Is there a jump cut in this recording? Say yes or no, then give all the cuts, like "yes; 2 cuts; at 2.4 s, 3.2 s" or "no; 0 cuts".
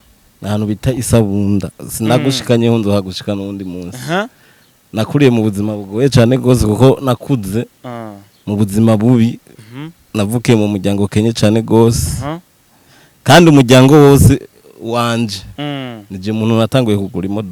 no; 0 cuts